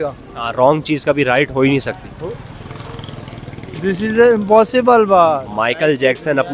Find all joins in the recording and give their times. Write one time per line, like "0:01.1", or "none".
0:05.5